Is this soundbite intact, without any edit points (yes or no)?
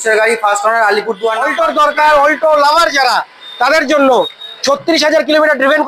no